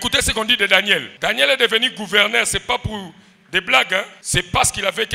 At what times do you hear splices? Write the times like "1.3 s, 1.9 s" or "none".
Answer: 1.1 s, 4.2 s